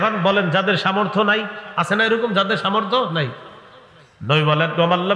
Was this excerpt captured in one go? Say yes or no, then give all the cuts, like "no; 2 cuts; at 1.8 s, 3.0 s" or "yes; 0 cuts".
yes; 0 cuts